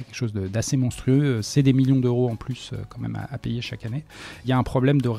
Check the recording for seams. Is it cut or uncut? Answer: cut